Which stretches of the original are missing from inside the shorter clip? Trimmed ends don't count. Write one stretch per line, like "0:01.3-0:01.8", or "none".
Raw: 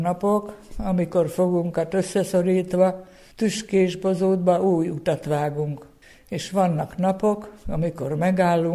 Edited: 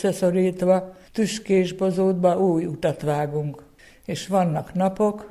0:03.1-0:03.2